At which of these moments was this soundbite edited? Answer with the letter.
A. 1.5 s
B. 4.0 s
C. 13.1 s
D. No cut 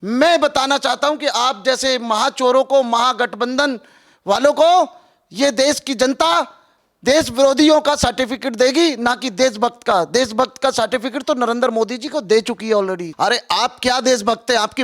C